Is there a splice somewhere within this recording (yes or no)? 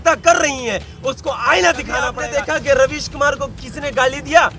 yes